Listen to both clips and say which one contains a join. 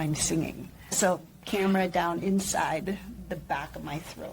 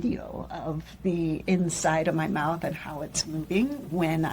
first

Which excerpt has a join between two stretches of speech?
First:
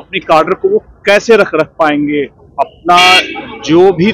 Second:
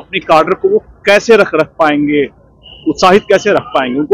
first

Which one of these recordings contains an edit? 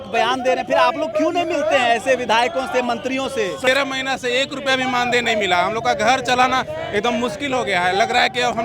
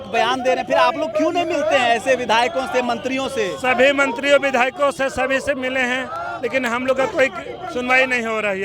first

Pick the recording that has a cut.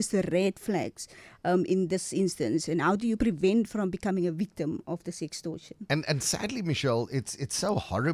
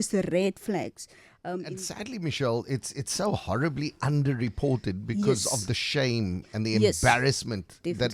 second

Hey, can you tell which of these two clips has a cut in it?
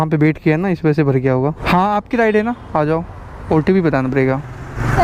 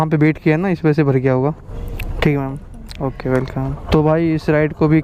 first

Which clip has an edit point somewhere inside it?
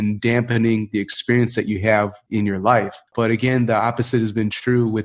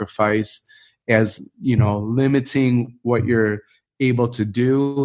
first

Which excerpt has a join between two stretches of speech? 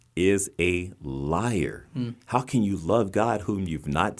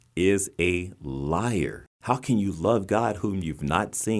second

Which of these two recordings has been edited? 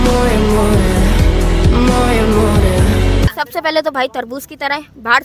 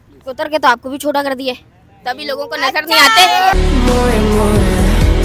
first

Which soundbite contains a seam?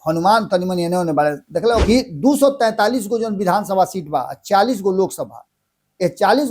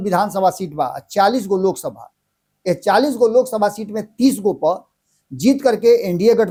first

